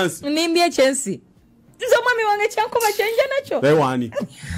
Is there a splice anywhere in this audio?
no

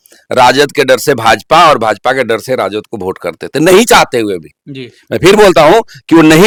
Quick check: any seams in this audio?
no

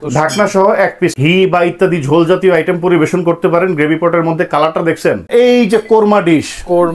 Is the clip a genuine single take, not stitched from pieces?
no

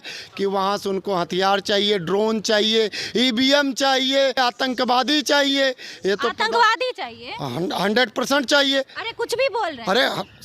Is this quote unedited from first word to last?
no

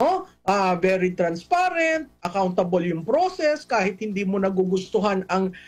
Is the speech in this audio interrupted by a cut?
no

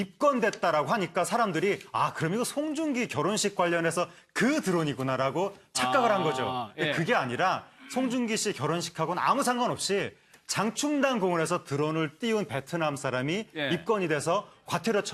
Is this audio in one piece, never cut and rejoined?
no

